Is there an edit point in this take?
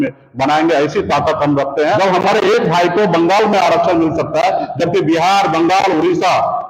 yes; 1 cut; at 2.0 s

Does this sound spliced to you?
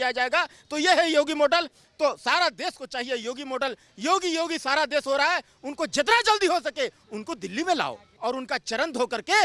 yes; 3 cuts; at 1.8 s, 7.1 s, 8.1 s

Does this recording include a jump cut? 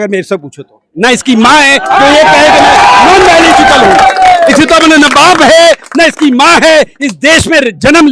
no; 0 cuts

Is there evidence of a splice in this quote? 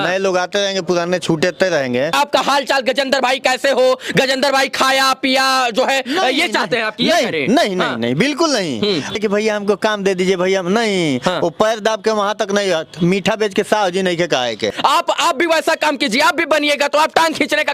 yes; 3 cuts; at 2.1 s, 9.1 s, 14.7 s

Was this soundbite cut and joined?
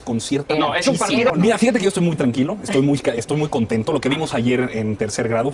yes; 1 cut; at 1.3 s

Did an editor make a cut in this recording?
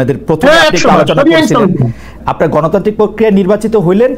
yes; 1 cut; at 2.2 s

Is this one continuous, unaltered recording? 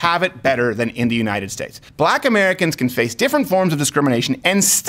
no; 1 cut; at 1.8 s

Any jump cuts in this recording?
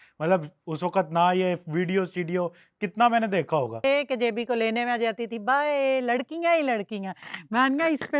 yes; 1 cut; at 3.9 s

